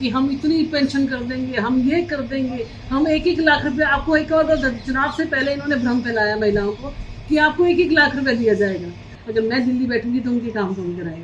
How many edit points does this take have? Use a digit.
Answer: 1